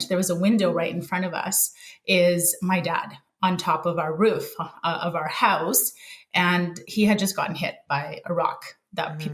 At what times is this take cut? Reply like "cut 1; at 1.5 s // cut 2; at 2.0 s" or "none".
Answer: none